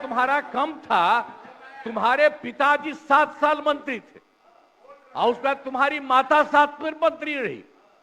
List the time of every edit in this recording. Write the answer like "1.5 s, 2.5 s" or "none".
none